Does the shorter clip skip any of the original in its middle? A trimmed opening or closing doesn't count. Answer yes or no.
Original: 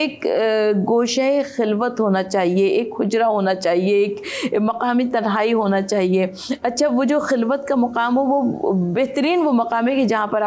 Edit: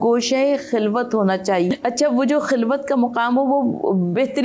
yes